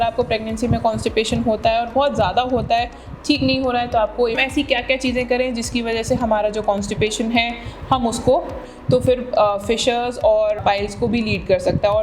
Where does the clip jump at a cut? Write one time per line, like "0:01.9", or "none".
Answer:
0:04.4
0:08.7
0:10.6